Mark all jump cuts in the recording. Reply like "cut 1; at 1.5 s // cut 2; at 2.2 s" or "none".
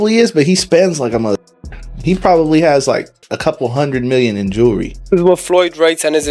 cut 1; at 5.1 s